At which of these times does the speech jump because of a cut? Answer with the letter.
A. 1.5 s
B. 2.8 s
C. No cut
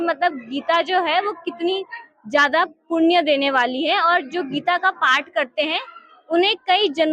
C